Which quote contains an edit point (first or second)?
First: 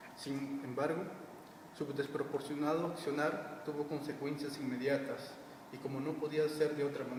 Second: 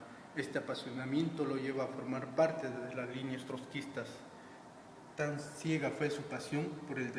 second